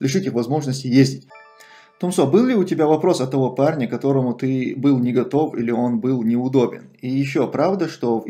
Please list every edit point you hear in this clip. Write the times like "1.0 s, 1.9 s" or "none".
1.3 s